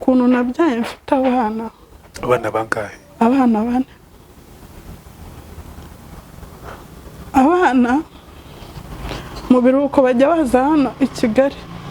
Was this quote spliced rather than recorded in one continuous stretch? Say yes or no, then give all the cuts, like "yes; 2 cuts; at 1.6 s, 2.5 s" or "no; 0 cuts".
yes; 1 cut; at 2.0 s